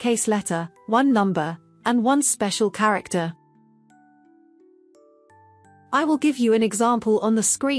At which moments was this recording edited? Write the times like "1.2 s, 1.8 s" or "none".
3.4 s, 5.9 s